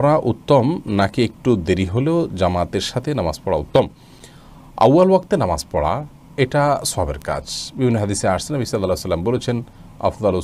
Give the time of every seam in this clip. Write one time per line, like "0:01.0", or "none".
none